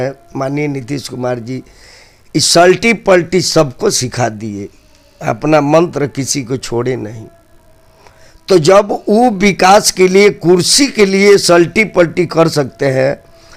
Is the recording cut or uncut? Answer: uncut